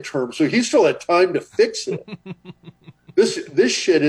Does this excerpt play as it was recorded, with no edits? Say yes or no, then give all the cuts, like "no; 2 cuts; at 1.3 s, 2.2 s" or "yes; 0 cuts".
yes; 0 cuts